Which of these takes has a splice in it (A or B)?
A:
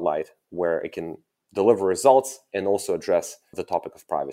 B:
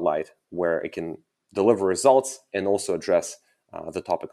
A